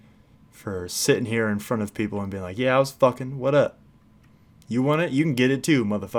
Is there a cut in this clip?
no; 0 cuts

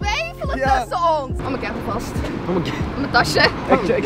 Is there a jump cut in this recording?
no; 0 cuts

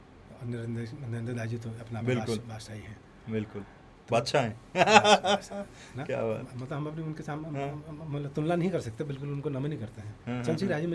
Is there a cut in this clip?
no; 0 cuts

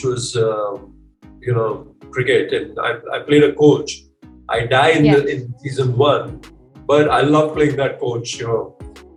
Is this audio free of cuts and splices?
yes; 0 cuts

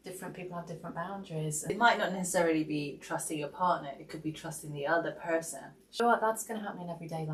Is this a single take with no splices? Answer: yes; 0 cuts

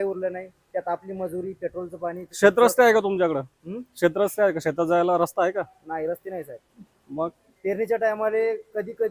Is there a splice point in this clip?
no; 0 cuts

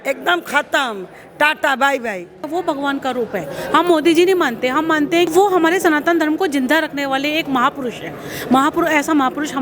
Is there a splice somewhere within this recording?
yes; 2 cuts; at 2.4 s, 5.3 s

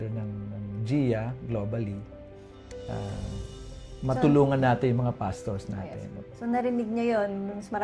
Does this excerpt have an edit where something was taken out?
no; 0 cuts

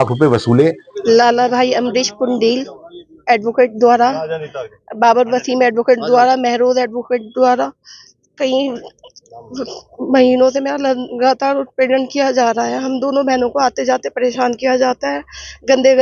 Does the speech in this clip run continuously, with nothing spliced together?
no; 1 cut; at 0.9 s

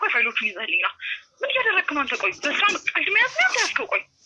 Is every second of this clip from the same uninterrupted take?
yes; 0 cuts

